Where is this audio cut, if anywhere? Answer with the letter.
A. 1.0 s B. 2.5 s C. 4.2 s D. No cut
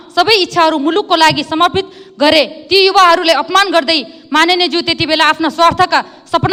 D